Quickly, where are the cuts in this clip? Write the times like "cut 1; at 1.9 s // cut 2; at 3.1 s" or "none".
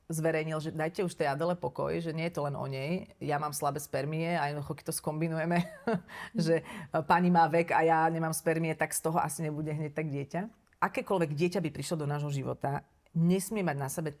cut 1; at 10.6 s